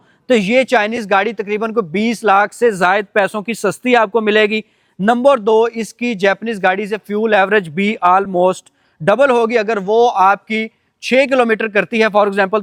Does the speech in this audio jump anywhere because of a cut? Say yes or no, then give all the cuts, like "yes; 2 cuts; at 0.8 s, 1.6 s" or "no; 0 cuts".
no; 0 cuts